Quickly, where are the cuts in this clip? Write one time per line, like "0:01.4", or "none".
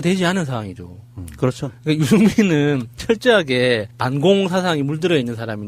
0:02.8